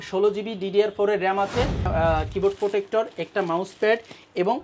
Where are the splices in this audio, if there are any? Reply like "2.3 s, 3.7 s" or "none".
1.8 s